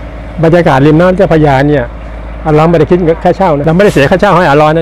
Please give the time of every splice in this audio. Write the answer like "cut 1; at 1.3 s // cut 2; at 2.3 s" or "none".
cut 1; at 3.6 s